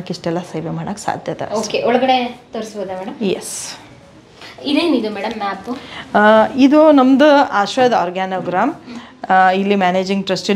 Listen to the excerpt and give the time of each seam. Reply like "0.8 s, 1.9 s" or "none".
none